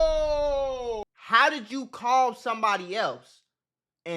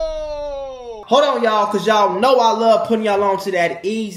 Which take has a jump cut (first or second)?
first